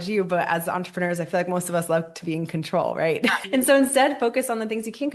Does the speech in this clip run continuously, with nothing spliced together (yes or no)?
no